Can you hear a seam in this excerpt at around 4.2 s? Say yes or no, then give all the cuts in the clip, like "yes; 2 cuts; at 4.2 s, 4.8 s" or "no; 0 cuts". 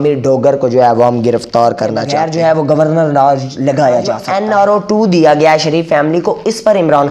yes; 2 cuts; at 2.4 s, 4.2 s